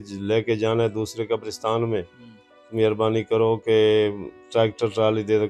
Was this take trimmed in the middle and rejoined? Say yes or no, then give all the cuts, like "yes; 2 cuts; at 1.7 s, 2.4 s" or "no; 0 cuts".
no; 0 cuts